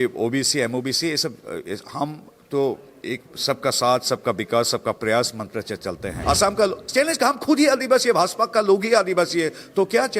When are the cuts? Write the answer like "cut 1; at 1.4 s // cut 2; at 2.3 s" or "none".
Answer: cut 1; at 6.1 s